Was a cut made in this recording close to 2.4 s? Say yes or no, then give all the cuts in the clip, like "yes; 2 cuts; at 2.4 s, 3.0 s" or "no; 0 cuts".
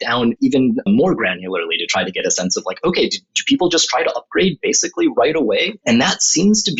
no; 2 cuts; at 0.7 s, 5.7 s